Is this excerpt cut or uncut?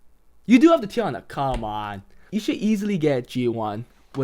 cut